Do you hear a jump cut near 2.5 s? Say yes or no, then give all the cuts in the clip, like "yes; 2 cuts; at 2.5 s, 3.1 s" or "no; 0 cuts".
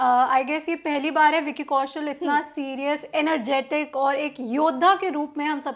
no; 0 cuts